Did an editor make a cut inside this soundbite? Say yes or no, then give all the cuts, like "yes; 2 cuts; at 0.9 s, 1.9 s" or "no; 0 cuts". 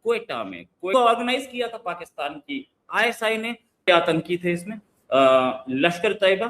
yes; 2 cuts; at 0.9 s, 3.9 s